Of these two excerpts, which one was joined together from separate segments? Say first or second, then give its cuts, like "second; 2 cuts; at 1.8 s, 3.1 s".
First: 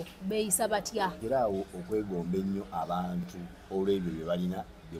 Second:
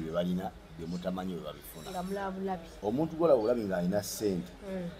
first; 1 cut; at 1.2 s